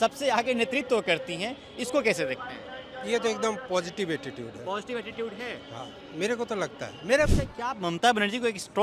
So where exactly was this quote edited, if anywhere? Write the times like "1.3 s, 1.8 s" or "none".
7.3 s